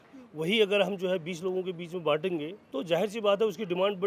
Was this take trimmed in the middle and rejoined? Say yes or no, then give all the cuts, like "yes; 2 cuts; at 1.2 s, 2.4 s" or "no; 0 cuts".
yes; 1 cut; at 2.6 s